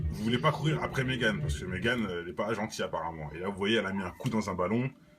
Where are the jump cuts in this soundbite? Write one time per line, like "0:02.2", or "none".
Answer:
none